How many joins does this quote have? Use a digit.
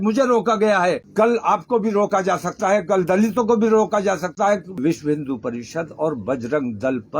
2